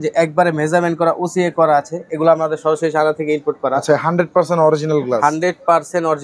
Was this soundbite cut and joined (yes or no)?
no